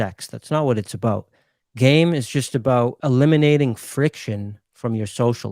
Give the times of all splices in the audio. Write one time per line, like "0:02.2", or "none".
0:03.0